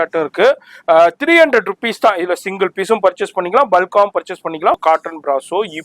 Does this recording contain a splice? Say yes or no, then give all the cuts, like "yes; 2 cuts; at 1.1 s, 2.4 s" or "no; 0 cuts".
yes; 1 cut; at 4.8 s